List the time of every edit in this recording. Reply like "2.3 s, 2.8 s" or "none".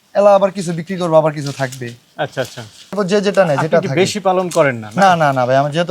3.0 s